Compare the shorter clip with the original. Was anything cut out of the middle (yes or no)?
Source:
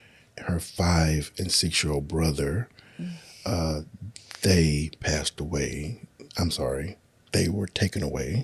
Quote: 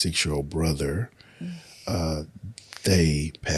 no